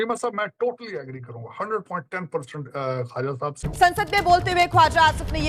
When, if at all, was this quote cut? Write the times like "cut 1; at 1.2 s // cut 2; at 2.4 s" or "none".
cut 1; at 3.6 s